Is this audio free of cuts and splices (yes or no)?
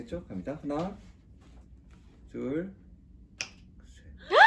yes